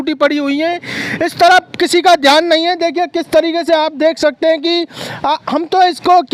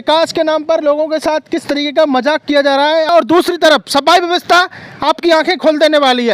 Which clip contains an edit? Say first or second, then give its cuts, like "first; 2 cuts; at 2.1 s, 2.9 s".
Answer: second; 1 cut; at 3.1 s